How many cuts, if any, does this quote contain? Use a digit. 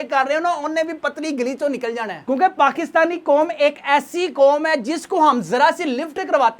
1